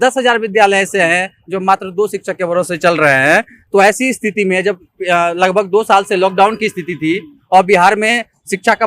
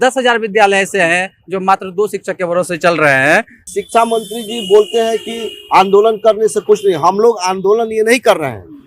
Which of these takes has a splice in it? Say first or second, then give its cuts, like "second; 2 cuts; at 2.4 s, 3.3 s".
second; 1 cut; at 3.6 s